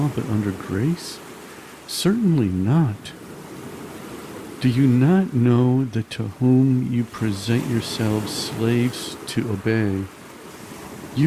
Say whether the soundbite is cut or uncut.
uncut